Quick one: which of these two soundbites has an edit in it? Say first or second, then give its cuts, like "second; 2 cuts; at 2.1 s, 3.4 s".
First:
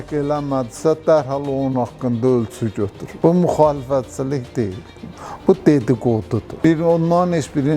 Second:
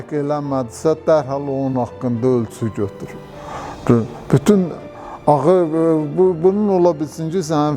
first; 2 cuts; at 3.0 s, 6.5 s